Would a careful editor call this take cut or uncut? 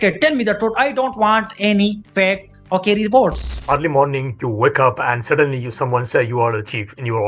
cut